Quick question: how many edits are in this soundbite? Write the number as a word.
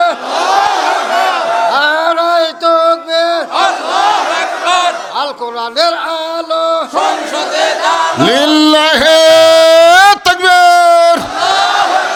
zero